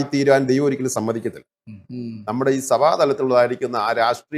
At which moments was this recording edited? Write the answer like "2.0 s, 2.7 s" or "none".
1.9 s